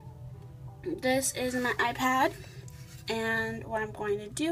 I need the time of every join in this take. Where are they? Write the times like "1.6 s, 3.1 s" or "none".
none